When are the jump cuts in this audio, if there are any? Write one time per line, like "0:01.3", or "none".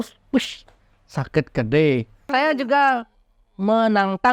0:02.3